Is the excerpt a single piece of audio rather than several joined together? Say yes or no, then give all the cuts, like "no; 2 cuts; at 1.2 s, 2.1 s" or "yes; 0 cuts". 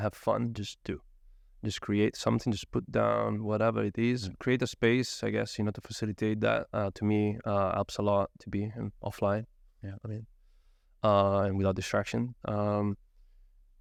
yes; 0 cuts